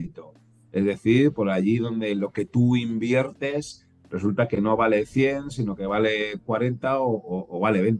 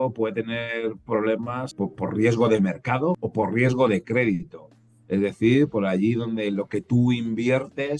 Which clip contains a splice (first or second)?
second